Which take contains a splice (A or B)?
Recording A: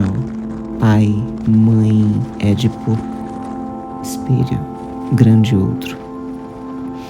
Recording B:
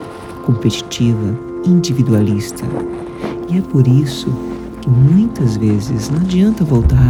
A